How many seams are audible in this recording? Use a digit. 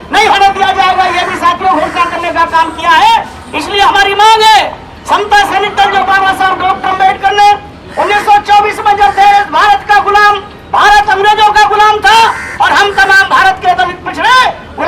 0